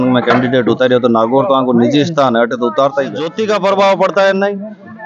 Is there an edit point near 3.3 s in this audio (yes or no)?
yes